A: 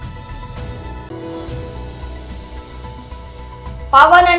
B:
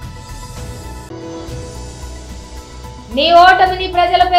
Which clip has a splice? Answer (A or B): A